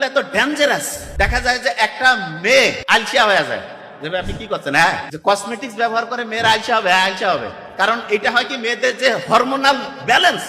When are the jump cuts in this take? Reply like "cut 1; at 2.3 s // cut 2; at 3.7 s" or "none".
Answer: cut 1; at 1.0 s // cut 2; at 2.8 s // cut 3; at 5.1 s